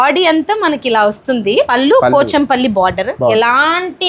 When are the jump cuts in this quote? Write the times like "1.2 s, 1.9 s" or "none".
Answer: 1.7 s, 3.3 s